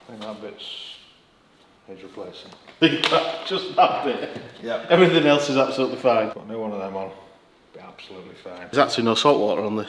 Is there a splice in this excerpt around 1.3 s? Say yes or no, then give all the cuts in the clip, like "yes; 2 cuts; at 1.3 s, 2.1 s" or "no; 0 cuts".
no; 3 cuts; at 2.7 s, 6.4 s, 8.7 s